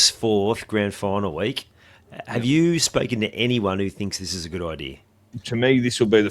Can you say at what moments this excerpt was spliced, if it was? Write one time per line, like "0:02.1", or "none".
0:05.4